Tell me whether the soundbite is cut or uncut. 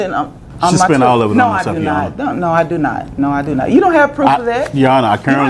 uncut